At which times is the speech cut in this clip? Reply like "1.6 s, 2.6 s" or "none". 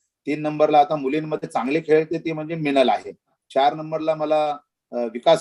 3.3 s